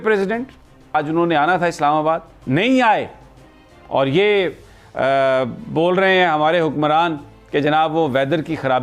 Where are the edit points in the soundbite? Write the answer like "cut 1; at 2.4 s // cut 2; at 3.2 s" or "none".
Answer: cut 1; at 0.9 s